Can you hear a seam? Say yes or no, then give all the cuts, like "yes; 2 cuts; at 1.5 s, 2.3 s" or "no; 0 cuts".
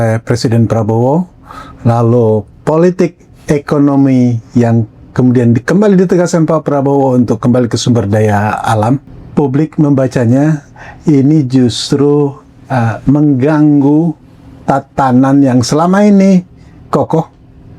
yes; 2 cuts; at 9.1 s, 16.8 s